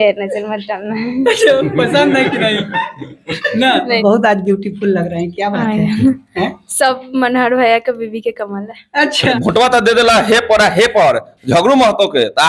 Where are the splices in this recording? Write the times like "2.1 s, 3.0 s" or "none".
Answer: 4.0 s, 9.3 s